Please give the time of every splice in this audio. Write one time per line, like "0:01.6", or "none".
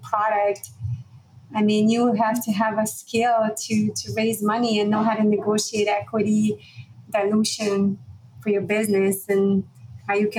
none